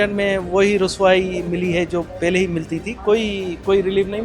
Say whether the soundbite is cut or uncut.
uncut